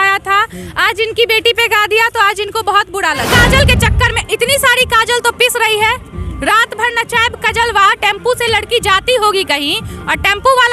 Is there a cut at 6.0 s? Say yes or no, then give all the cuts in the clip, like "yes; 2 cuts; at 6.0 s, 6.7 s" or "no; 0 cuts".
no; 1 cut; at 3.3 s